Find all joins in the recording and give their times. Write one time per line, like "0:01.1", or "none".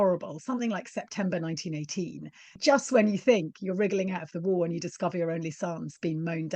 0:02.5